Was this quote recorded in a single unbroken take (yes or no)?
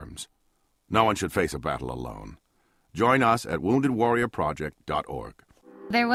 yes